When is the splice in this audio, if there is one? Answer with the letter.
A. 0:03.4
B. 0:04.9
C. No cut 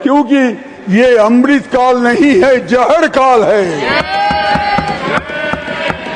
B